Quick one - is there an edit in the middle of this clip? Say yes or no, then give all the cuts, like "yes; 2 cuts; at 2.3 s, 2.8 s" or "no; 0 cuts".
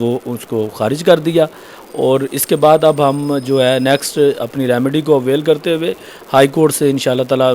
no; 0 cuts